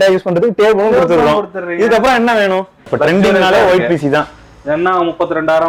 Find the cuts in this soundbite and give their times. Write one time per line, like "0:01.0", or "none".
0:02.9